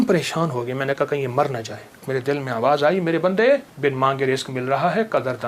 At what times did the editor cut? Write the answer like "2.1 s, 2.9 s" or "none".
2.0 s, 3.7 s